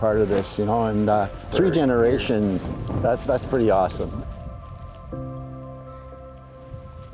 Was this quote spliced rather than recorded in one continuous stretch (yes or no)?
no